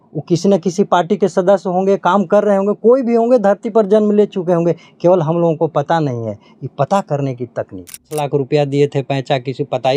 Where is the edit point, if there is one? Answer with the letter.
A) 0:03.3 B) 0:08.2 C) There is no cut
B